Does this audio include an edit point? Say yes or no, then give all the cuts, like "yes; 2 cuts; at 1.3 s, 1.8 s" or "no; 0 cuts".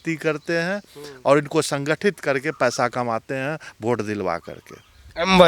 no; 0 cuts